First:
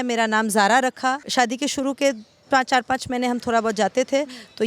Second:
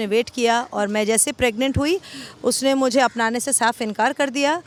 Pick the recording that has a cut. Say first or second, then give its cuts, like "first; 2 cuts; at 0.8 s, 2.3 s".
first; 1 cut; at 1.2 s